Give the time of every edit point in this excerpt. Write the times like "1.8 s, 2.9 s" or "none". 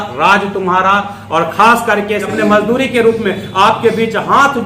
2.4 s